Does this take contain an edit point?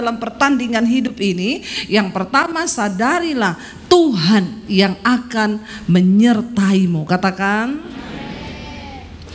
no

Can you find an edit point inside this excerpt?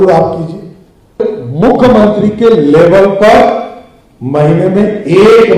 yes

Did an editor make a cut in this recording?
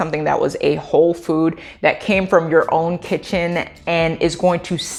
no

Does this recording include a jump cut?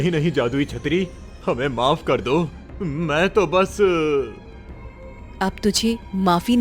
no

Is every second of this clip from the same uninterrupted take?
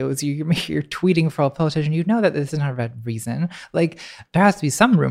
no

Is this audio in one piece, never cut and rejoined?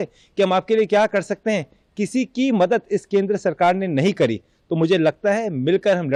yes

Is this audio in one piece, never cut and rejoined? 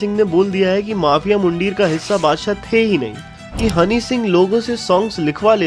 no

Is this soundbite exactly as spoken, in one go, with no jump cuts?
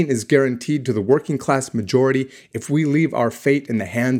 yes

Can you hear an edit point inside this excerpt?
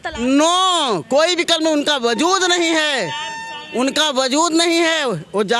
no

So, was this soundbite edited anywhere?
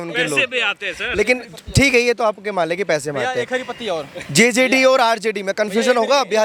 no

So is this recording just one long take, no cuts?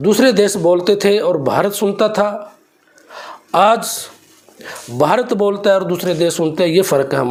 yes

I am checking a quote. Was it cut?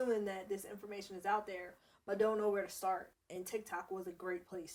no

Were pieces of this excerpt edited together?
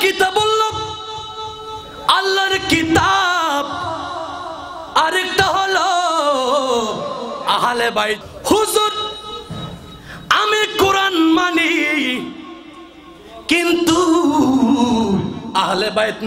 yes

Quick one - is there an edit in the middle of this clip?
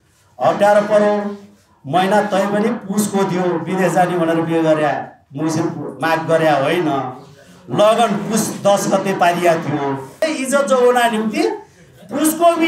yes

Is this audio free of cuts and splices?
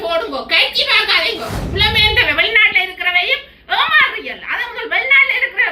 no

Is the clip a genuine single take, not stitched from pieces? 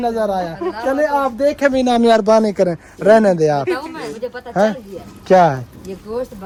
yes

